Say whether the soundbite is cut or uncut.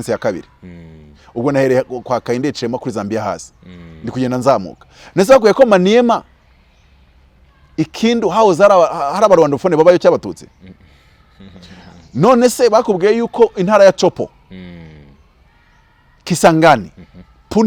uncut